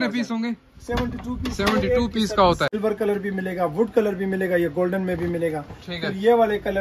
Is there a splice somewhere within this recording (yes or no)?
yes